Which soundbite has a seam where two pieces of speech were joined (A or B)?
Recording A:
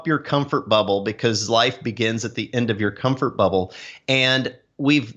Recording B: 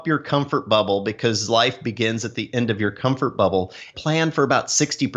B